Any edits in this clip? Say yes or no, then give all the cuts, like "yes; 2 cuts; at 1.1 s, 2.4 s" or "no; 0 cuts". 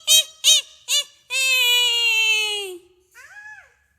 no; 0 cuts